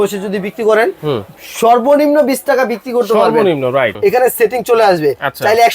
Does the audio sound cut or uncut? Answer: cut